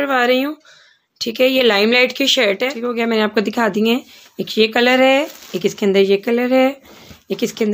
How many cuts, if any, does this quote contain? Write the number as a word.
one